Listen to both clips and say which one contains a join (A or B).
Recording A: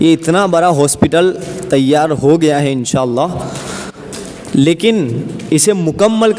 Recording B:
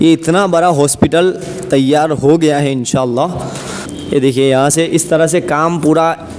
B